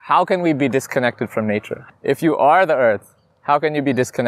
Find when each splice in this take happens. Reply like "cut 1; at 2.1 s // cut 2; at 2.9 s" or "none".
cut 1; at 1.8 s